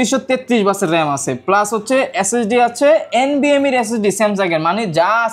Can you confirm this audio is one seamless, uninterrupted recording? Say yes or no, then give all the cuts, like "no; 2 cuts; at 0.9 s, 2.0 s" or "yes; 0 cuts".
yes; 0 cuts